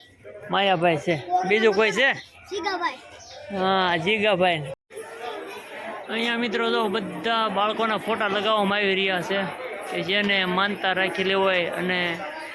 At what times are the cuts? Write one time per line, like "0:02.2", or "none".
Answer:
0:04.7